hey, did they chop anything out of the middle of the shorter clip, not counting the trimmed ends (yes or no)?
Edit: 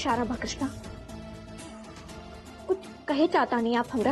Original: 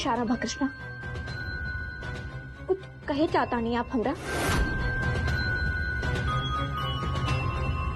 no